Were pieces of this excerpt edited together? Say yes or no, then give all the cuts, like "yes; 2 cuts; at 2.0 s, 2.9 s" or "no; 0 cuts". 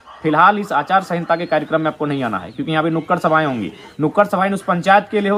no; 0 cuts